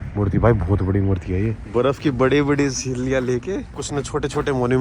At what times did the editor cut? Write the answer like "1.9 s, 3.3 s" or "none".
1.6 s, 3.8 s